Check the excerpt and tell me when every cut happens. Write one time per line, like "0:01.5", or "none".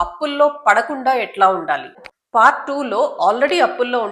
0:02.0